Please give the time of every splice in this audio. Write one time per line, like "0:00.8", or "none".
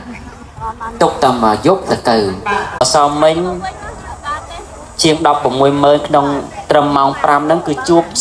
0:02.7

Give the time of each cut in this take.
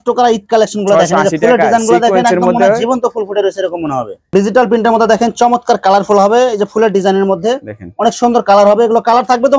0:04.2

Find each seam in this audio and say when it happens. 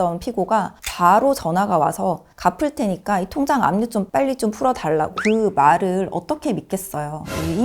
0:05.2

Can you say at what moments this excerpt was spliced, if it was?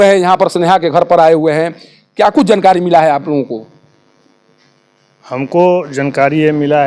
none

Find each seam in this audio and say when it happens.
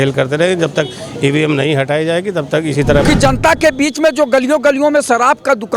0:03.0

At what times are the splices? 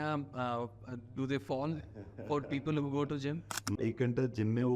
0:03.8

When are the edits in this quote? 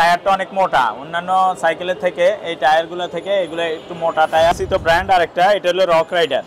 0:04.5

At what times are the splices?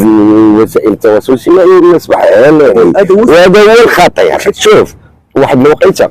0:04.6

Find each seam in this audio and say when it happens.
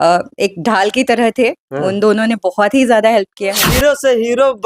0:03.7

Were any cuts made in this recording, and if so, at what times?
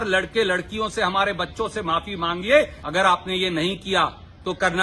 0:02.8

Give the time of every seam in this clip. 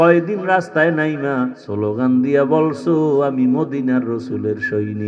0:01.6

